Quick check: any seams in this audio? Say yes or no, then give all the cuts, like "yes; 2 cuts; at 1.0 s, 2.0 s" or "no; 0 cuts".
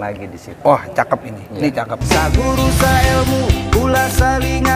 yes; 1 cut; at 2.0 s